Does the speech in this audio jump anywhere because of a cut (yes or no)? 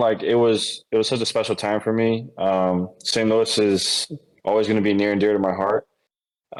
no